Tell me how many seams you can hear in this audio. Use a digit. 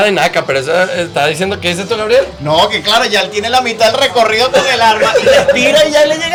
0